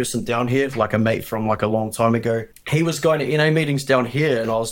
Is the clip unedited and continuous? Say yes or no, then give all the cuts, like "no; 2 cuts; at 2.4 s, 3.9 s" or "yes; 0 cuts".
no; 1 cut; at 2.6 s